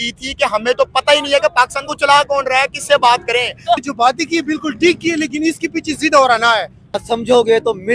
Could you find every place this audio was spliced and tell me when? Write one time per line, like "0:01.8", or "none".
0:03.8
0:07.0